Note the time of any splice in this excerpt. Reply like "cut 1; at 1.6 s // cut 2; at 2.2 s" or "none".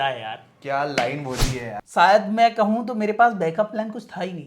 cut 1; at 1.7 s